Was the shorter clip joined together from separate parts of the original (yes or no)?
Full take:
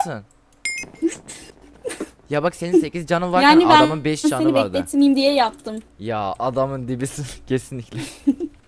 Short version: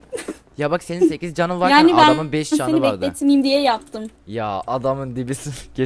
no